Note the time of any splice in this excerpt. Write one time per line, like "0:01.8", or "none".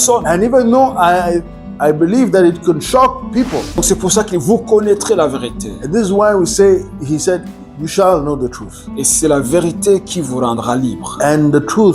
0:03.8